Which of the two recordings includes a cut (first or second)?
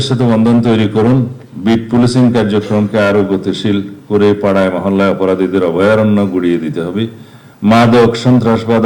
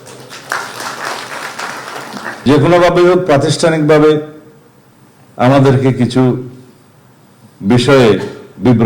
second